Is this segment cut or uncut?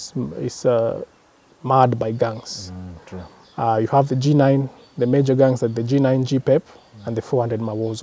uncut